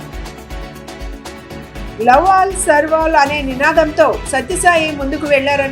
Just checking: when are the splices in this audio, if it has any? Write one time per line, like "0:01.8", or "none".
0:01.3